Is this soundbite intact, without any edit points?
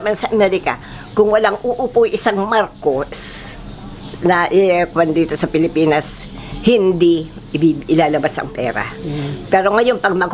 yes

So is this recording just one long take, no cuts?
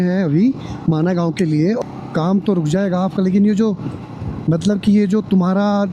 no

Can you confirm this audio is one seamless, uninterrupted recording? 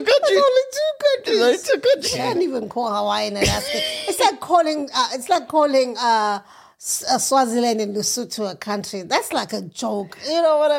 no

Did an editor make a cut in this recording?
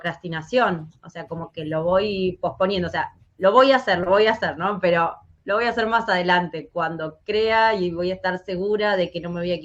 no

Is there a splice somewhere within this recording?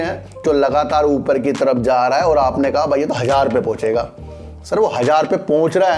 no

